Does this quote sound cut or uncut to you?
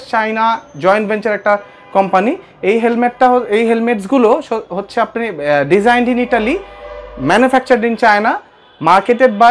uncut